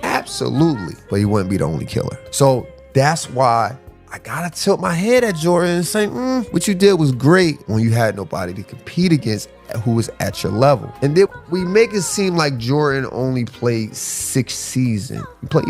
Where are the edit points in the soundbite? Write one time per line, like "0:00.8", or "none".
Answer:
0:02.2
0:10.9